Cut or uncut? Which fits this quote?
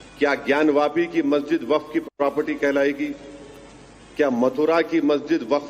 cut